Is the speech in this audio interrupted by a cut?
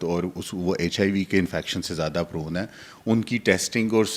no; 0 cuts

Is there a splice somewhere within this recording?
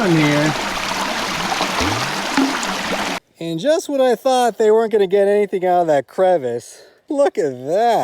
yes; 2 cuts; at 3.2 s, 7.1 s

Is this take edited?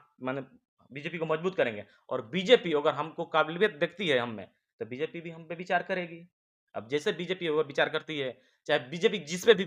no; 0 cuts

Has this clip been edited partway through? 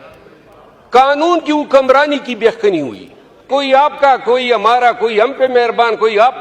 yes; 1 cut; at 3.4 s

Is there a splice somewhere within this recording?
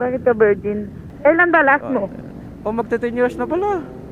yes; 1 cut; at 1.1 s

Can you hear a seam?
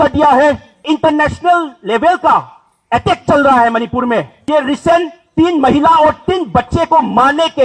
yes; 2 cuts; at 0.8 s, 4.4 s

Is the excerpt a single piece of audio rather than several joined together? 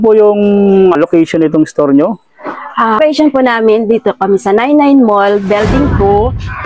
no; 2 cuts; at 1.0 s, 3.0 s

